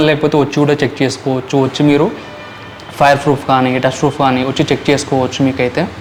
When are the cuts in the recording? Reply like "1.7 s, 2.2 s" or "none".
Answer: none